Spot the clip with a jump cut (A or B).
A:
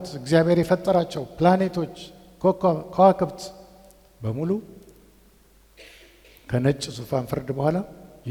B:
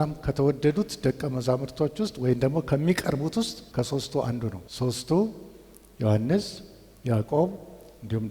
B